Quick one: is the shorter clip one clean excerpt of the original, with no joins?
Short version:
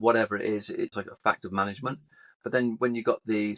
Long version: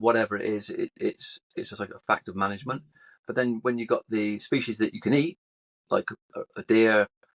no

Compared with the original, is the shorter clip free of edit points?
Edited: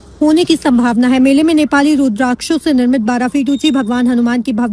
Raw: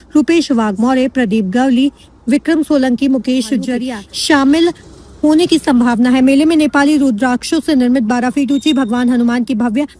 yes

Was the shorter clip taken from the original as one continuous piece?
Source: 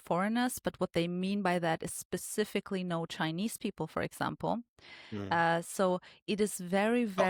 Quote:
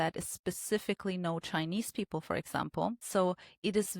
no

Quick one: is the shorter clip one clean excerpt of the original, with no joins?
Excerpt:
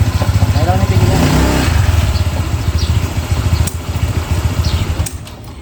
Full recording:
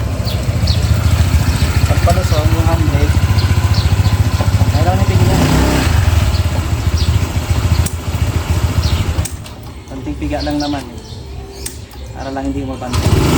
yes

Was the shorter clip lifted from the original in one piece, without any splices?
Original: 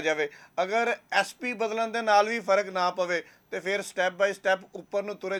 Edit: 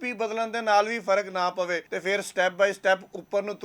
no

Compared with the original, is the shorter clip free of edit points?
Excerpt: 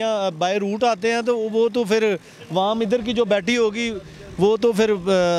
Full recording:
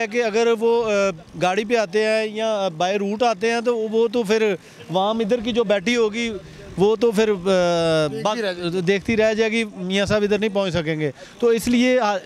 yes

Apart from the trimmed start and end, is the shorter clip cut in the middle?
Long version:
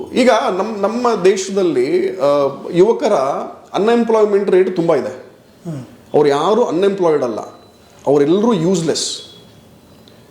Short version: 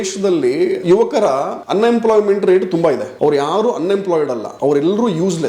yes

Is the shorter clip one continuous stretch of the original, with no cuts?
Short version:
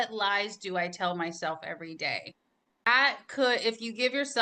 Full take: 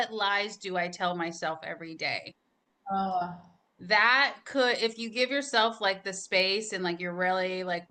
no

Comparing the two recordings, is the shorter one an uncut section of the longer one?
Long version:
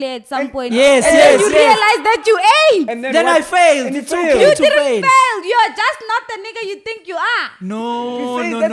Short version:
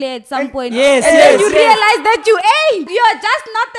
no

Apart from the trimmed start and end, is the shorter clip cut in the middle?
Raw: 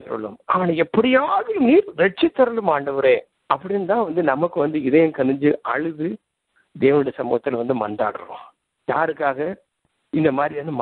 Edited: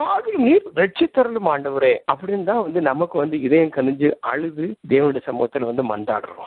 yes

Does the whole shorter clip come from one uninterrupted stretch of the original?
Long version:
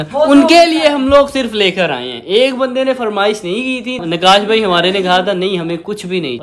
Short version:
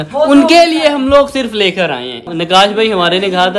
no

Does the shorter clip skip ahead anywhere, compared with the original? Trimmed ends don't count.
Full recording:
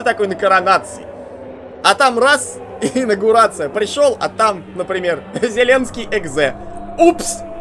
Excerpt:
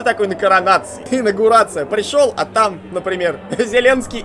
yes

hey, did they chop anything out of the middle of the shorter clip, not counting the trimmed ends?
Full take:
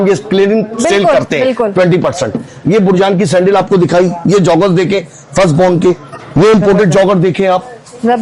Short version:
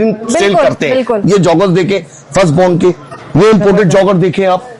yes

